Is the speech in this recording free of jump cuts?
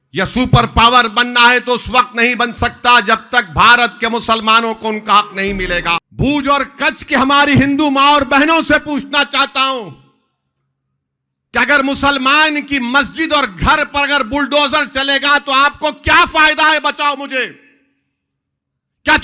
no; 1 cut; at 6.1 s

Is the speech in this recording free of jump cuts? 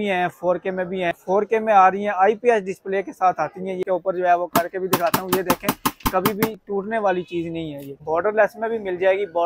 no; 3 cuts; at 1.2 s, 3.8 s, 8.0 s

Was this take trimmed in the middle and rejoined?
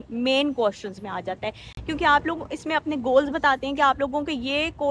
no; 0 cuts

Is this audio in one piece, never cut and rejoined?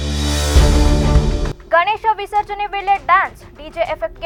yes; 0 cuts

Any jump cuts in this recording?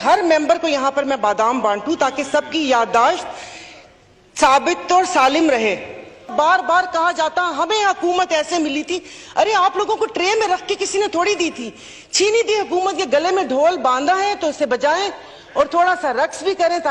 yes; 1 cut; at 6.3 s

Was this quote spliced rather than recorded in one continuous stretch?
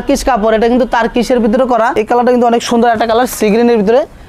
yes; 1 cut; at 2.0 s

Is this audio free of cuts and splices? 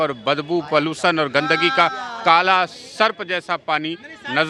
yes; 0 cuts

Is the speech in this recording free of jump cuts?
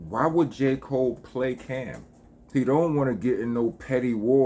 no; 1 cut; at 2.3 s

